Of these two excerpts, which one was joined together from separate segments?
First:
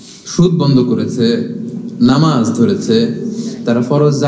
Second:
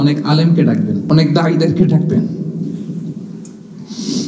second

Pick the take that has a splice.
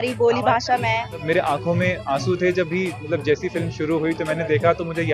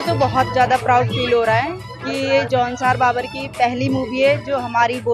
first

